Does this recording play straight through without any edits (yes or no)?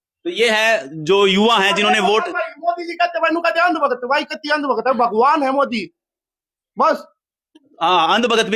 yes